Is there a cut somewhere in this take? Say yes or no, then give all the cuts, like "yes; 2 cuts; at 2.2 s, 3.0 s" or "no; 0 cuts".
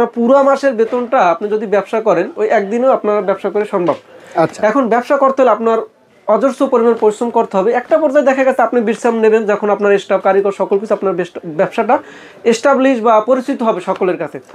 no; 0 cuts